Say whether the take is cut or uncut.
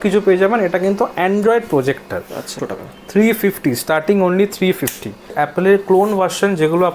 cut